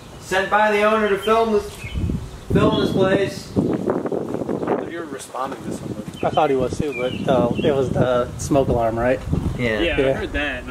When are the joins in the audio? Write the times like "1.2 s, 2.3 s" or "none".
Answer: none